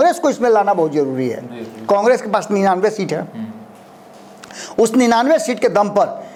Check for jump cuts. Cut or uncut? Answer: uncut